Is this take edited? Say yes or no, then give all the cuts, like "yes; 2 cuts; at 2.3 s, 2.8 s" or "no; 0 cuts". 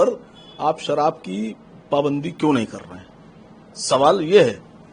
no; 0 cuts